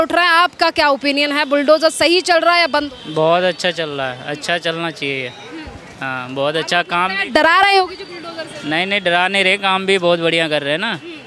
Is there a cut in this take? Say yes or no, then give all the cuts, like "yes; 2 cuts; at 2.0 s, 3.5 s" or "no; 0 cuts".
no; 0 cuts